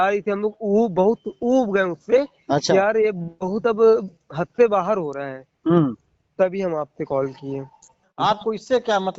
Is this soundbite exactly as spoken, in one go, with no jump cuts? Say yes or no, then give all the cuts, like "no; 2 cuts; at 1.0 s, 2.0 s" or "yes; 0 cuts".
no; 1 cut; at 8.0 s